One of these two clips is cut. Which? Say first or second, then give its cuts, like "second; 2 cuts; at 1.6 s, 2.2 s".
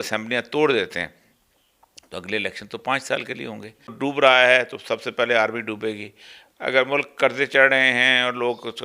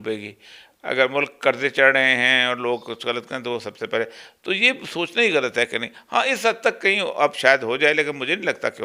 first; 1 cut; at 3.9 s